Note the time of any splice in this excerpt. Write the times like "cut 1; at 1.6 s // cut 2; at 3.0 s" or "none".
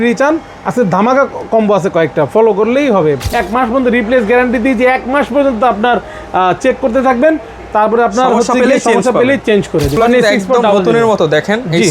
cut 1; at 3.3 s // cut 2; at 9.9 s